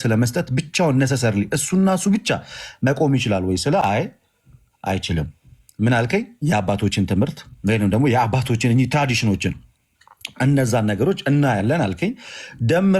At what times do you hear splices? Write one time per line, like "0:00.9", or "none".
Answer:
none